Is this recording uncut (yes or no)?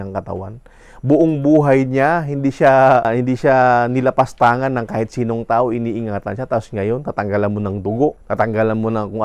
no